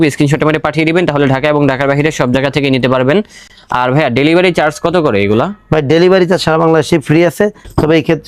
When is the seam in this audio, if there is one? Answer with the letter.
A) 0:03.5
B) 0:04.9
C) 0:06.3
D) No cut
D